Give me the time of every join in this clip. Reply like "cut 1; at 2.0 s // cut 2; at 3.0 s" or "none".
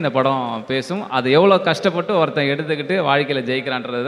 none